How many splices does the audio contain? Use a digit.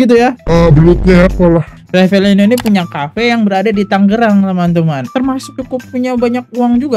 1